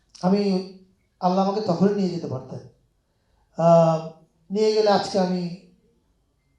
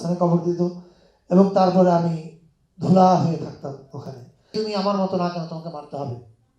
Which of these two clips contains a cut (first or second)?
second